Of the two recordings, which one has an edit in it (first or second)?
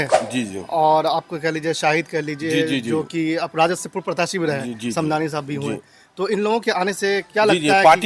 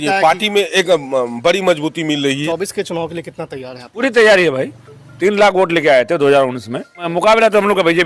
second